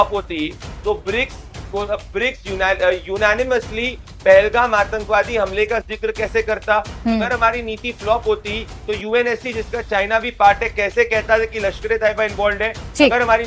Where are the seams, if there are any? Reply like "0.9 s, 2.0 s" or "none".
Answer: none